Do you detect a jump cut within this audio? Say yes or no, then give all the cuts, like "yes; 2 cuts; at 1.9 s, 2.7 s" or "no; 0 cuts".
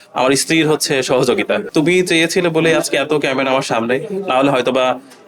yes; 1 cut; at 1.7 s